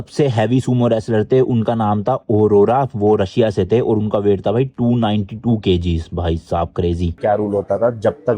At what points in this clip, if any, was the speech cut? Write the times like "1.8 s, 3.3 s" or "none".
7.2 s